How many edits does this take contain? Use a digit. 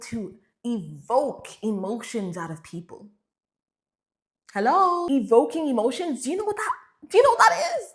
1